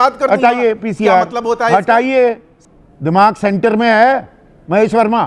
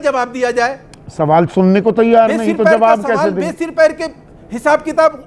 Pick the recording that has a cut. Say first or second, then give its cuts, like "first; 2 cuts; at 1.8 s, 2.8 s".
first; 1 cut; at 2.6 s